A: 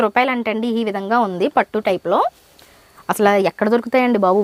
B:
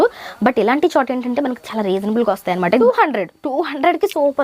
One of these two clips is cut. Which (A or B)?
B